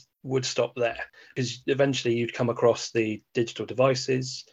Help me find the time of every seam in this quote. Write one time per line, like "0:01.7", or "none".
0:01.3